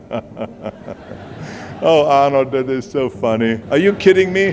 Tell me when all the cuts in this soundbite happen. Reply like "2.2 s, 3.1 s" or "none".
3.6 s